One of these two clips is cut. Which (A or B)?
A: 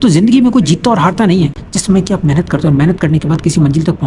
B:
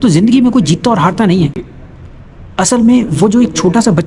A